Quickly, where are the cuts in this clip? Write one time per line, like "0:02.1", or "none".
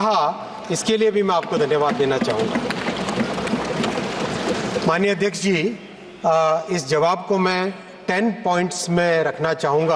none